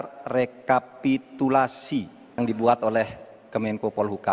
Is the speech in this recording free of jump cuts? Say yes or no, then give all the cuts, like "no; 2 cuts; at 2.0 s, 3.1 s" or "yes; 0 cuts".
no; 1 cut; at 2.4 s